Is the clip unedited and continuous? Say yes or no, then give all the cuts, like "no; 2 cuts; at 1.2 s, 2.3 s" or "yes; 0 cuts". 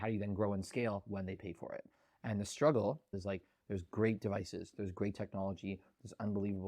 no; 1 cut; at 3.2 s